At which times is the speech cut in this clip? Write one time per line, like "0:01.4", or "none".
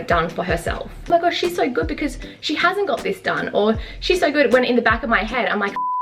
0:01.0